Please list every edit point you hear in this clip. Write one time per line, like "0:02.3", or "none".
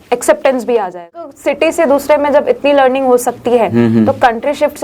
0:01.2